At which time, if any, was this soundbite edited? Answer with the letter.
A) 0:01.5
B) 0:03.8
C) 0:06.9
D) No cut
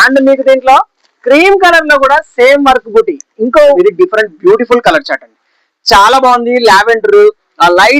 B